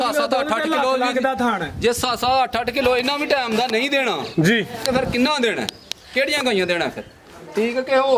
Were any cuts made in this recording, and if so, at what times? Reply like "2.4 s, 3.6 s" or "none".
none